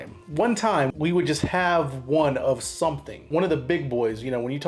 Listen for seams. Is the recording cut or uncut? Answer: cut